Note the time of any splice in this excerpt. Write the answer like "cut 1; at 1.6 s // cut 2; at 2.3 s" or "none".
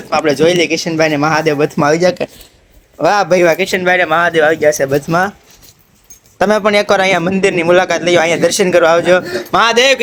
none